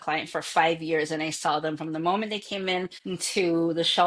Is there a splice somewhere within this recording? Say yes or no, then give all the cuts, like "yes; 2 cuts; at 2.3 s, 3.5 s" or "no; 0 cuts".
yes; 1 cut; at 3.0 s